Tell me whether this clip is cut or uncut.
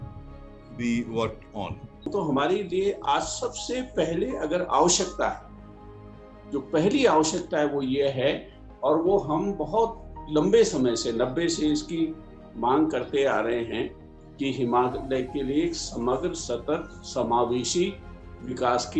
cut